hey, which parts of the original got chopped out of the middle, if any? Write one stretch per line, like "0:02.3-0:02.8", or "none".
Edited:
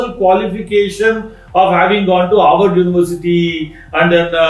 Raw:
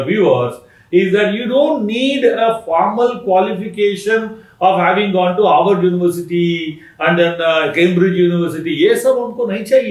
none